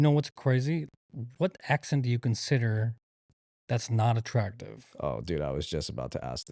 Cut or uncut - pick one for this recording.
uncut